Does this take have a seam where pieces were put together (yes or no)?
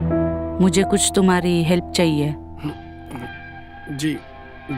no